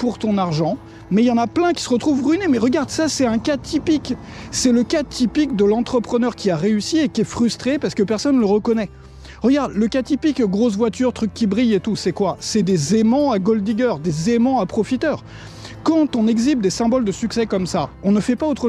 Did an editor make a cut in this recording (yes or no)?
yes